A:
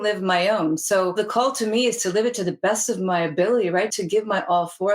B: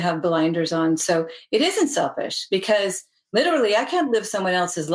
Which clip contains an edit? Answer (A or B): A